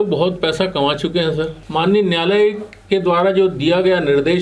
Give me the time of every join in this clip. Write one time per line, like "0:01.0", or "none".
0:01.6